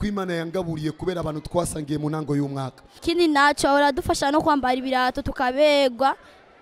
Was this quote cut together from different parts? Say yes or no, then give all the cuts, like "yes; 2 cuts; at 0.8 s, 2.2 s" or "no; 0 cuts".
yes; 1 cut; at 2.8 s